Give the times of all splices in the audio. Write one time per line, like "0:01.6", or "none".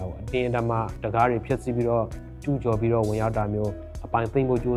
none